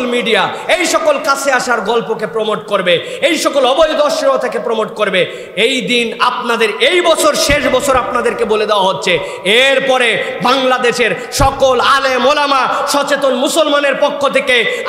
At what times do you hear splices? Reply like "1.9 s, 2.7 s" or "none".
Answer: none